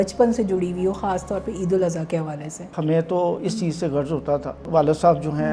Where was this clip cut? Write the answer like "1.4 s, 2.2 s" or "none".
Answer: 2.7 s, 4.7 s